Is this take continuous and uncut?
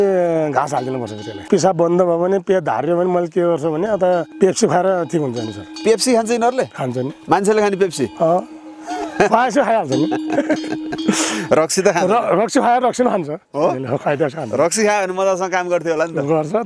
no; 2 cuts; at 1.5 s, 4.3 s

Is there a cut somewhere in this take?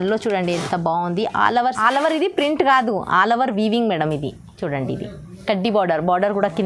yes; 1 cut; at 1.8 s

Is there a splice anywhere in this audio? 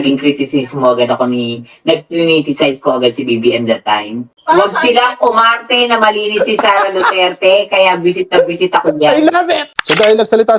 yes; 2 cuts; at 4.3 s, 9.7 s

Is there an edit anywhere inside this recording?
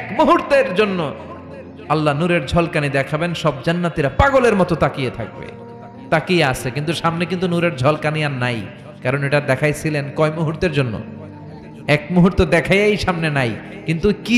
no; 0 cuts

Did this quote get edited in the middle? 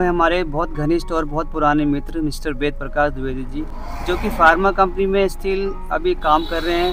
no; 0 cuts

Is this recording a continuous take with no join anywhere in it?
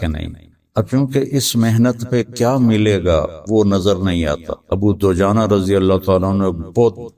no; 1 cut; at 4.5 s

